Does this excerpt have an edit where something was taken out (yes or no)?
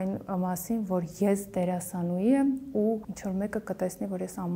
yes